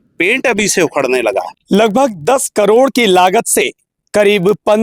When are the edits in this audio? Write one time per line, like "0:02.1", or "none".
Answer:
0:01.5